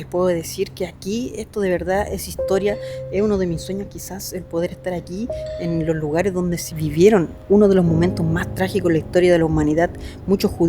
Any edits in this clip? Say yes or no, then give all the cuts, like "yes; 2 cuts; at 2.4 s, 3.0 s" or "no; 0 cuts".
yes; 1 cut; at 6.7 s